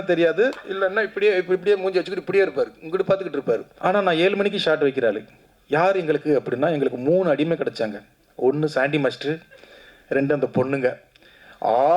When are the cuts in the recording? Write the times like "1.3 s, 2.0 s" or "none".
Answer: 3.7 s